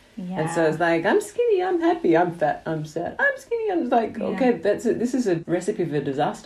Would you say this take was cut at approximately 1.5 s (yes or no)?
no